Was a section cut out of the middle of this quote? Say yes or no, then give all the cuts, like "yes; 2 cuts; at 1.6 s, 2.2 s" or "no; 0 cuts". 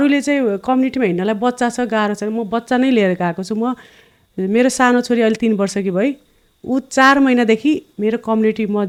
no; 0 cuts